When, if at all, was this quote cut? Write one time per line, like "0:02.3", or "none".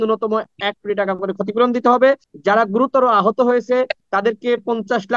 0:02.3
0:04.0